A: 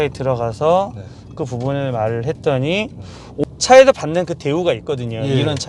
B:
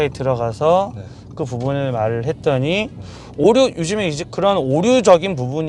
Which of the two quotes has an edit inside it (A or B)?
A